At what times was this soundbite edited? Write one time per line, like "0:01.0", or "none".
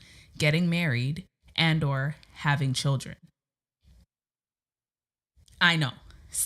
none